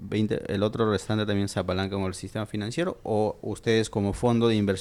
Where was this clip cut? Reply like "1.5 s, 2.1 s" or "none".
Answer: none

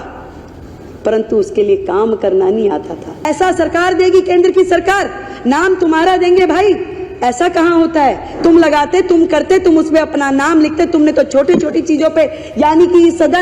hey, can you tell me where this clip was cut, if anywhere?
3.3 s

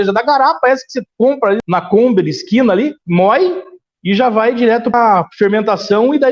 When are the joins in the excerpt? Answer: 1.6 s, 4.9 s

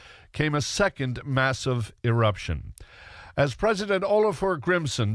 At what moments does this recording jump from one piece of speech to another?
3.8 s

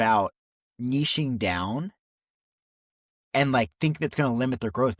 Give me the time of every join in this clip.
none

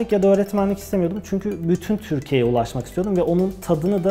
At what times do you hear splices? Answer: none

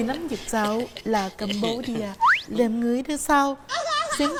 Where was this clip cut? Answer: none

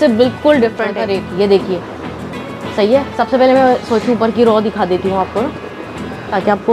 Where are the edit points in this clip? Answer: 1.0 s

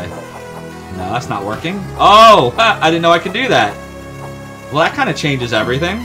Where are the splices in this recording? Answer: none

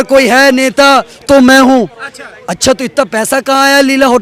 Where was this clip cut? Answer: none

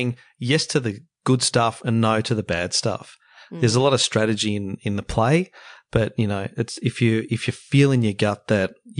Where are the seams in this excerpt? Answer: none

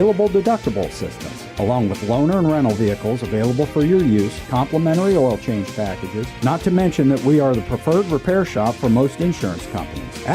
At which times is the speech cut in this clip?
none

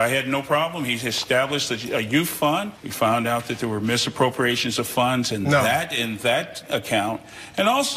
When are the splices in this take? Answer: 6.3 s

